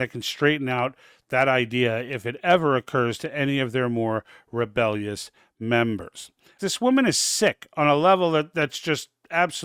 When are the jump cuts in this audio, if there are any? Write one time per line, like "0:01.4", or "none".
0:06.5